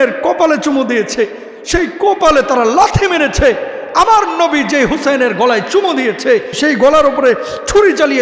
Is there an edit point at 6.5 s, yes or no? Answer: yes